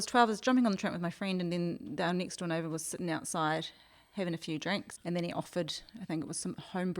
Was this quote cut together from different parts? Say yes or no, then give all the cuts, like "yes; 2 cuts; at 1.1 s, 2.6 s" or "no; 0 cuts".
yes; 1 cut; at 4.9 s